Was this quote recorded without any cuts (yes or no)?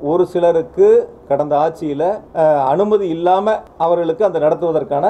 no